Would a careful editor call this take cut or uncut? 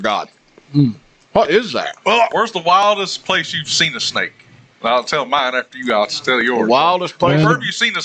cut